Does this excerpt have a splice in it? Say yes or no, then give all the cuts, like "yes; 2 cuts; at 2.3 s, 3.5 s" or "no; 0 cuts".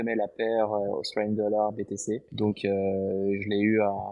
yes; 1 cut; at 2.3 s